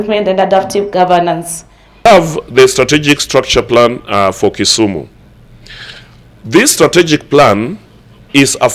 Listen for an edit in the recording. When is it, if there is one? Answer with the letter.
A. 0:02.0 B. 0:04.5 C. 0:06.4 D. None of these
A